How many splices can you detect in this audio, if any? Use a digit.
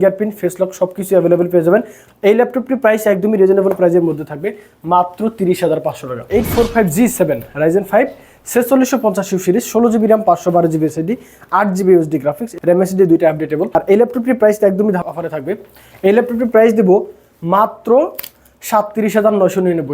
3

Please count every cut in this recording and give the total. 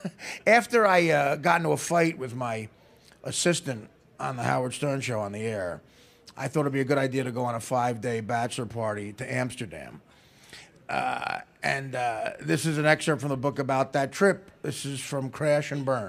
1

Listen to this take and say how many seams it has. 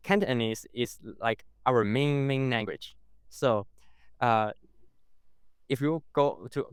0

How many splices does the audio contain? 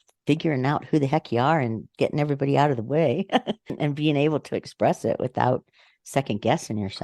1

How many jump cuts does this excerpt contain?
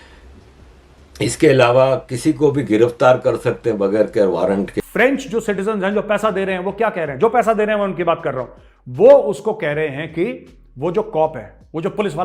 1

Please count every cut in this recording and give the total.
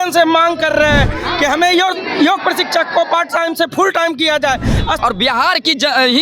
1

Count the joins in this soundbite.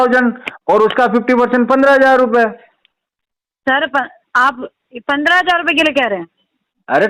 0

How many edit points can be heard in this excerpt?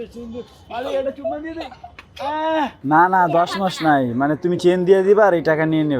1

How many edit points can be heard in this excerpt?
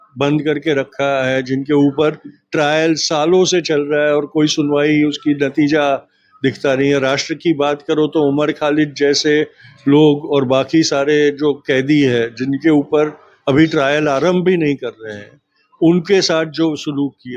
0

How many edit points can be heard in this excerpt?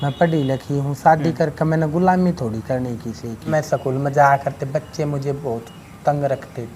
1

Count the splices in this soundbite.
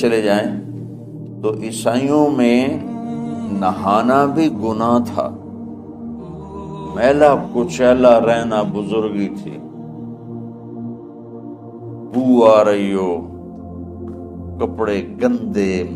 6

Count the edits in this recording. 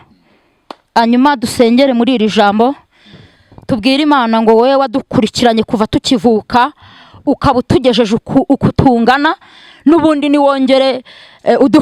0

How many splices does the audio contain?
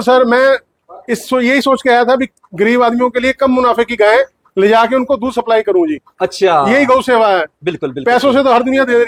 0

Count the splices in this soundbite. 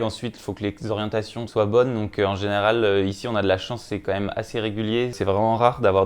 2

